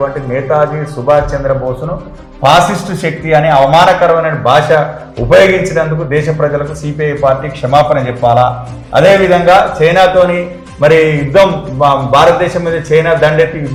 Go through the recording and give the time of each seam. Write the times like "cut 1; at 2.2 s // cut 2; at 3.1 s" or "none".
none